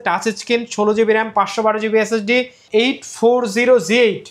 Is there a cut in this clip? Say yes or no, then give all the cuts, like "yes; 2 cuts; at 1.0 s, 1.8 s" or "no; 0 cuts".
yes; 1 cut; at 2.6 s